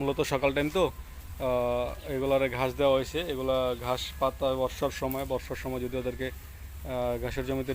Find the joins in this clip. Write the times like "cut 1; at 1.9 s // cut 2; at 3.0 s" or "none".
none